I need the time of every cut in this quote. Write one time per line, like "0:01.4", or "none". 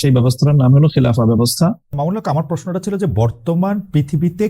0:01.9